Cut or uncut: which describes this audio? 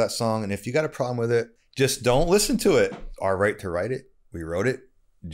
cut